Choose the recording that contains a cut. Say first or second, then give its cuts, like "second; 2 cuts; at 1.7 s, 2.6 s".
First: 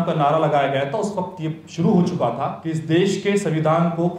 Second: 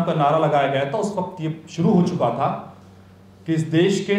first; 1 cut; at 2.6 s